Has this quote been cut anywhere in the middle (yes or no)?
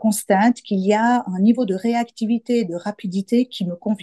no